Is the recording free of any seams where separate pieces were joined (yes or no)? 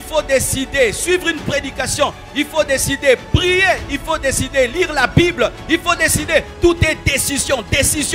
yes